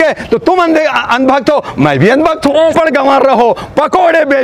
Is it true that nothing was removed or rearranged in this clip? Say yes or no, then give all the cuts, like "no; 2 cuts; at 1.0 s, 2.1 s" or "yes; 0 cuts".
no; 1 cut; at 2.7 s